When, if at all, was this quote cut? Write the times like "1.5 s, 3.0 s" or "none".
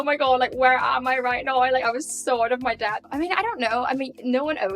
3.1 s